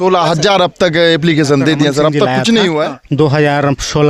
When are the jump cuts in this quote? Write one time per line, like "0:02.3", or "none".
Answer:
0:03.0